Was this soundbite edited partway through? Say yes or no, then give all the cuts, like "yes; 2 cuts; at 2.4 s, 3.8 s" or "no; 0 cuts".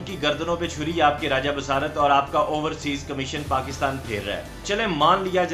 yes; 1 cut; at 4.6 s